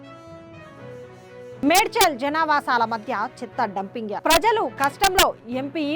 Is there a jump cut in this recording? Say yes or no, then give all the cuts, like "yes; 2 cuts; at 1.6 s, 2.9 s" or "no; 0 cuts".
yes; 1 cut; at 1.5 s